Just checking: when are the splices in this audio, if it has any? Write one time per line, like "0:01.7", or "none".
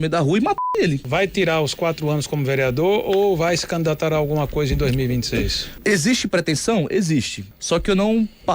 0:01.0
0:05.6